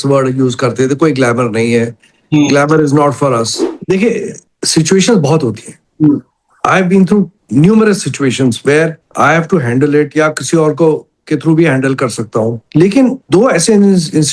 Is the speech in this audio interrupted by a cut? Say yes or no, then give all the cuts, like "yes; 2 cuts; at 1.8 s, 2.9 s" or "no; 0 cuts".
yes; 1 cut; at 3.6 s